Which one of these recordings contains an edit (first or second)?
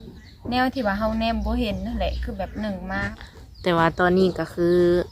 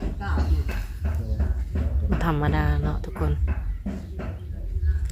first